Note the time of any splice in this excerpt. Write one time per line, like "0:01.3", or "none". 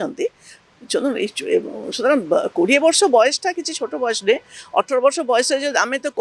none